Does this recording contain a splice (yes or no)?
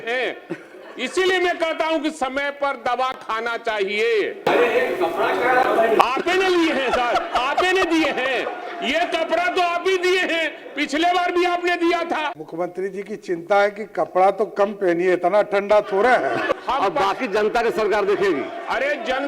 yes